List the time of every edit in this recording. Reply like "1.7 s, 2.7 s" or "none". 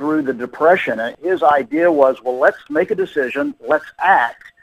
1.1 s, 2.7 s